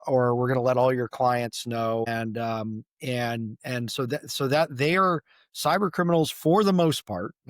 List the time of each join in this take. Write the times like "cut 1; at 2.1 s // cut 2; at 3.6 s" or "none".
cut 1; at 2.1 s